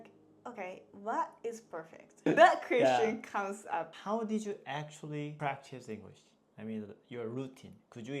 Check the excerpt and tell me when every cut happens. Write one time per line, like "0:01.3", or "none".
0:02.2